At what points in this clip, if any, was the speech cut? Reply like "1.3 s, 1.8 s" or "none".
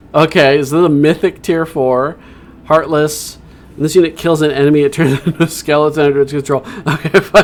none